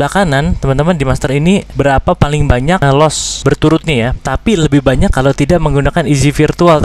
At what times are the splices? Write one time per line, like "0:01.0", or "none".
0:01.7
0:03.0
0:04.2